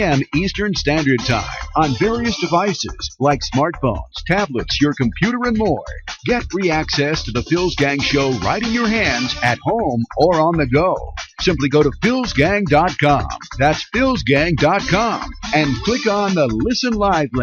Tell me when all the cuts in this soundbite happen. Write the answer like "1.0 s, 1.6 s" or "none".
none